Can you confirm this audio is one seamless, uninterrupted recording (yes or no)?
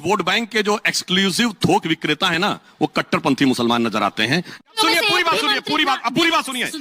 no